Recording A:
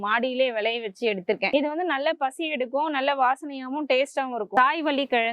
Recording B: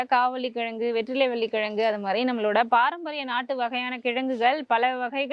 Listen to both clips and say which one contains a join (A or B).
A